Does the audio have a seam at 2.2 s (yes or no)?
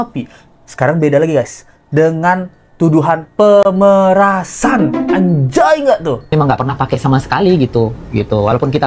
no